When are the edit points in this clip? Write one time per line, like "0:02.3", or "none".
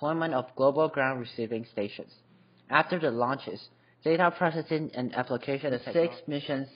0:05.7